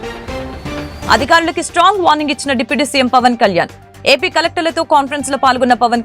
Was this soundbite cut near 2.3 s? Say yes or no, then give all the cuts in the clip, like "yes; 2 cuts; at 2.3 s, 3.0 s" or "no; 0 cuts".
no; 1 cut; at 1.1 s